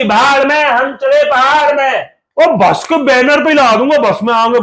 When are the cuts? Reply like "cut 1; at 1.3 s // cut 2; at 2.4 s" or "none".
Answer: cut 1; at 2.2 s

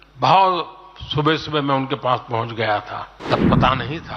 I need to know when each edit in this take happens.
cut 1; at 3.2 s

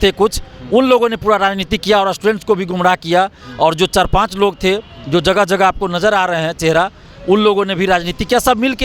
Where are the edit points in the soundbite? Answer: none

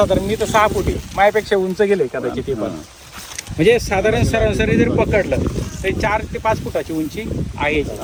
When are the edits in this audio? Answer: none

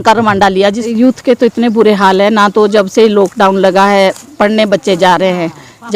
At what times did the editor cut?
cut 1; at 0.9 s

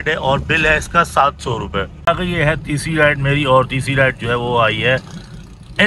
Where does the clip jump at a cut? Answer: cut 1; at 2.1 s

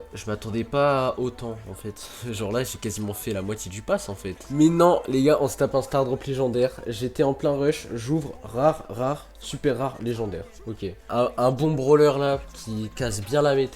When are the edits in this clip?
cut 1; at 4.4 s // cut 2; at 11.0 s

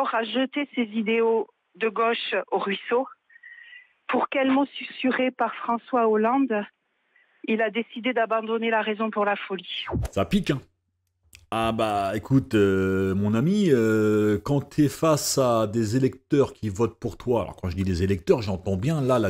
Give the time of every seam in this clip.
none

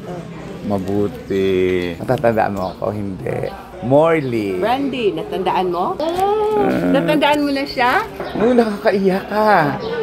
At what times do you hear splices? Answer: cut 1; at 2.0 s // cut 2; at 8.2 s

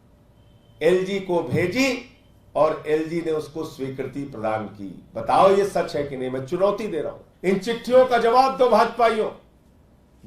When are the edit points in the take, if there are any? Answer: cut 1; at 7.2 s

